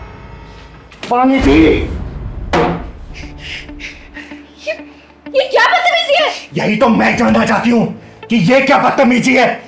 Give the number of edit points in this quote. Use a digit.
1